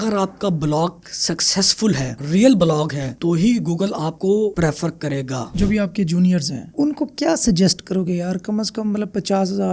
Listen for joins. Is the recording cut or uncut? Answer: cut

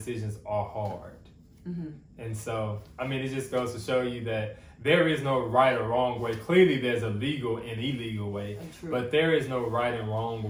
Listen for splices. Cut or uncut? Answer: uncut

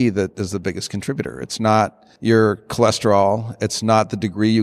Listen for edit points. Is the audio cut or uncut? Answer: cut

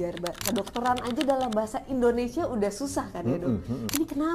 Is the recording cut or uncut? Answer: uncut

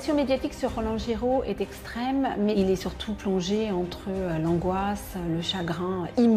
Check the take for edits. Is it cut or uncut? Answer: uncut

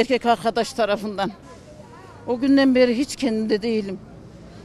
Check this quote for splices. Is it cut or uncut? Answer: uncut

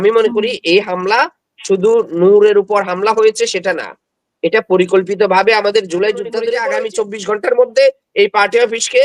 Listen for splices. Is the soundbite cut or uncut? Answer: cut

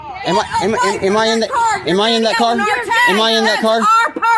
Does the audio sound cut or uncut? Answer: uncut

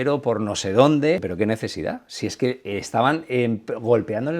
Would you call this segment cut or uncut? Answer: cut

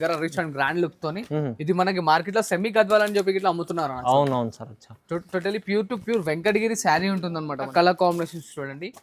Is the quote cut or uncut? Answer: cut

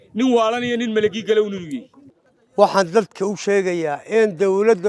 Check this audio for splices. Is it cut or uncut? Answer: uncut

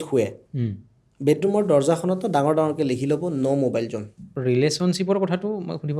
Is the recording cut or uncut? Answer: cut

